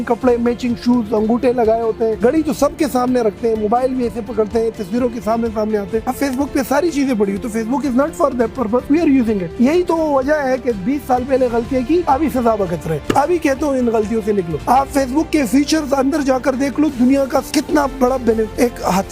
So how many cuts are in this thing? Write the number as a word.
one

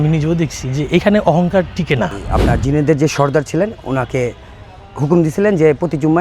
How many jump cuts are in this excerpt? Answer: one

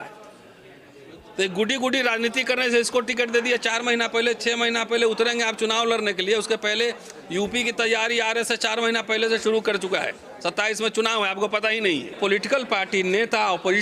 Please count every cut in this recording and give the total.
one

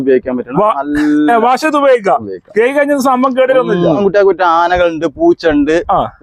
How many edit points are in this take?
one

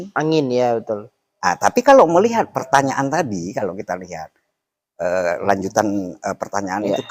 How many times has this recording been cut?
one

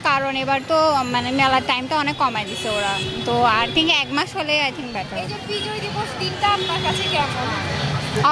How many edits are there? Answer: zero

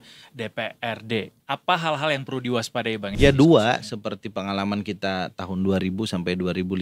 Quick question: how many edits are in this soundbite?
two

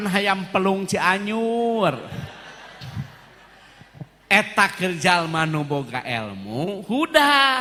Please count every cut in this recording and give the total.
zero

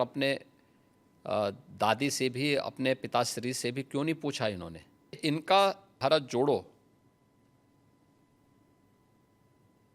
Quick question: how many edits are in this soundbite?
two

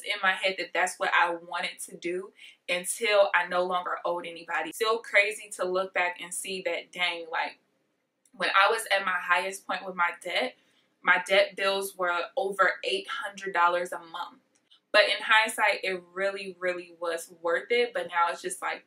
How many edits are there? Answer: two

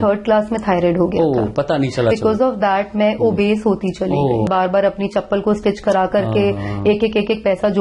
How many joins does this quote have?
two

